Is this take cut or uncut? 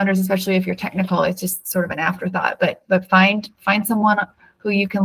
uncut